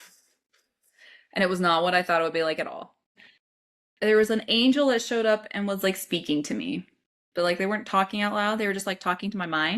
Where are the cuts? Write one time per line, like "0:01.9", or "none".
0:03.2